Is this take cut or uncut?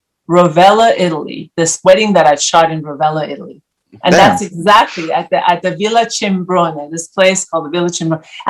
uncut